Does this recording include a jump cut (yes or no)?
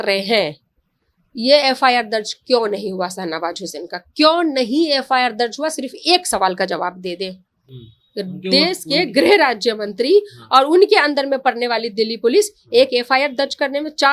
no